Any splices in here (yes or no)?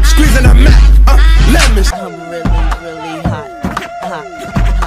yes